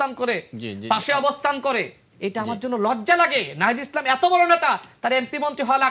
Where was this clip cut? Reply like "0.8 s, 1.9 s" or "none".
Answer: none